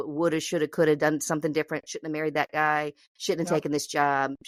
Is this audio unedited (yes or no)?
yes